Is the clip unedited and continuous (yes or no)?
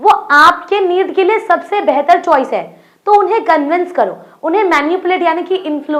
yes